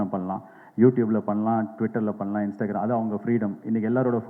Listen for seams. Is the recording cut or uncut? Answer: uncut